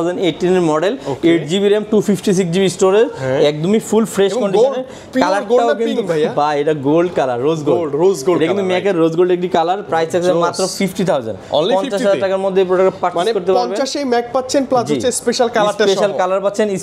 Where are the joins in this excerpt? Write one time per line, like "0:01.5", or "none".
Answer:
none